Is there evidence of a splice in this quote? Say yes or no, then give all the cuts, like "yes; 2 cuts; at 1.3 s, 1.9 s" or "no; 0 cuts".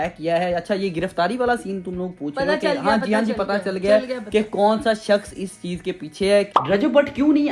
yes; 1 cut; at 6.5 s